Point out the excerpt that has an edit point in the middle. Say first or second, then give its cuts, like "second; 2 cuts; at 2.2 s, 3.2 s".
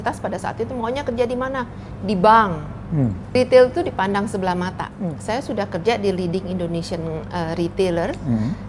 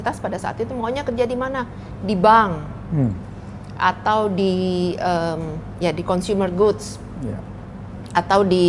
first; 2 cuts; at 3.3 s, 4.8 s